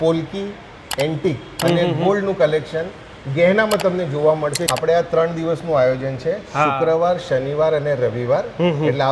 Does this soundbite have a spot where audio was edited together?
yes; 1 cut; at 4.7 s

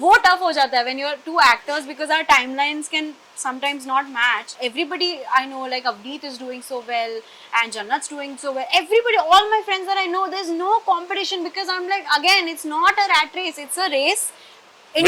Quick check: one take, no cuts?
no; 1 cut; at 4.5 s

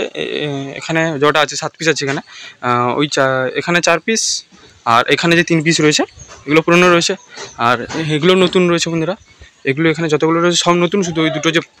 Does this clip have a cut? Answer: no; 0 cuts

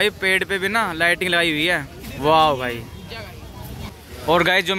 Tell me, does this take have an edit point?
yes; 2 cuts; at 2.0 s, 3.9 s

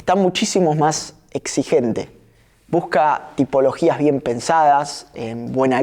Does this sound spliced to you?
no; 0 cuts

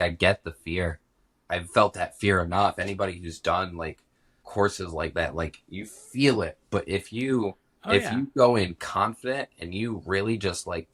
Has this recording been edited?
no; 0 cuts

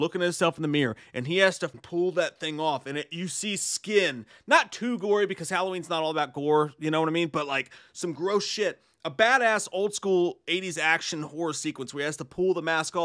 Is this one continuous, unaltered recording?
no; 1 cut; at 1.7 s

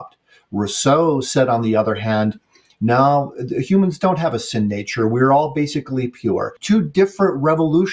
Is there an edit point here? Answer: yes; 1 cut; at 6.5 s

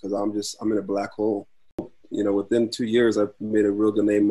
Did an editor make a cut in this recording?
yes; 1 cut; at 2.0 s

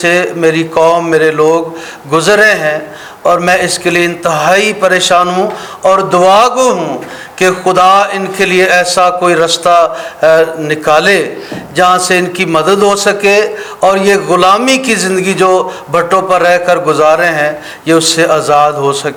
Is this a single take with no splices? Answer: yes; 0 cuts

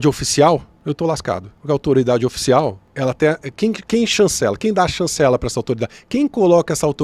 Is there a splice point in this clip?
yes; 2 cuts; at 1.1 s, 2.8 s

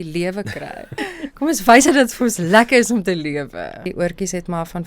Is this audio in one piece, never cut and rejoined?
no; 2 cuts; at 0.9 s, 3.9 s

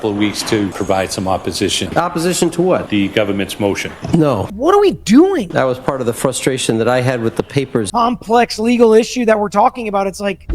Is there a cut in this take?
yes; 6 cuts; at 0.7 s, 1.9 s, 2.9 s, 4.5 s, 5.5 s, 7.9 s

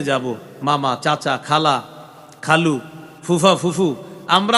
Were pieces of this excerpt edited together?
no; 0 cuts

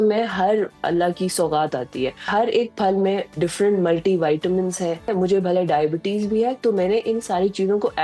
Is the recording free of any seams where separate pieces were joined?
no; 2 cuts; at 2.2 s, 5.1 s

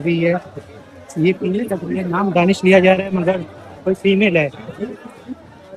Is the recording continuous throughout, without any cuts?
yes; 0 cuts

